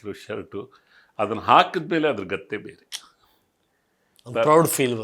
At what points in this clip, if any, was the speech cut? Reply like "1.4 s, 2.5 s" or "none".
none